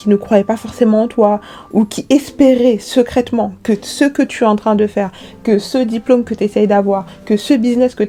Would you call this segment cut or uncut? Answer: uncut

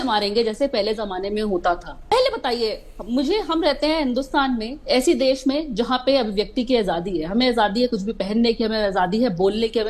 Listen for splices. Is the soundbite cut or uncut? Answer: cut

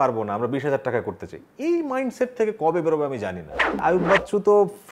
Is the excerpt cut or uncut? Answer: cut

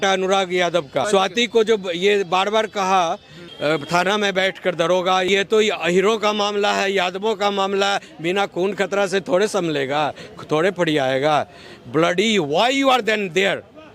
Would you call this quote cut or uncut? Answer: cut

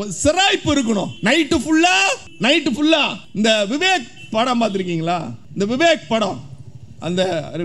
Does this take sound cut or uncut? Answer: cut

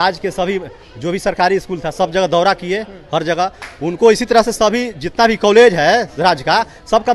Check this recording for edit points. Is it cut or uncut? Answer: uncut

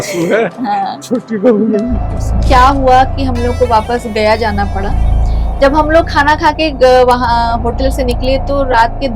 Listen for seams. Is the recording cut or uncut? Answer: cut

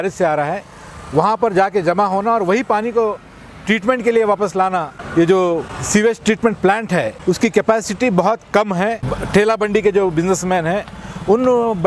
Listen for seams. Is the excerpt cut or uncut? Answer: cut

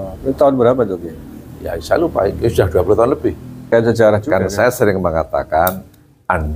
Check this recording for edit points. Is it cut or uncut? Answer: cut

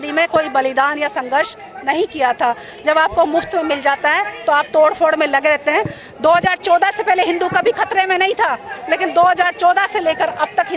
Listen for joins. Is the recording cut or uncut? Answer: uncut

